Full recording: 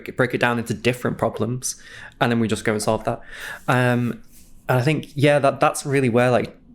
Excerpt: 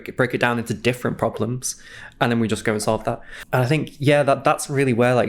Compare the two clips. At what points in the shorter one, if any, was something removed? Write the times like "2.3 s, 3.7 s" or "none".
3.3 s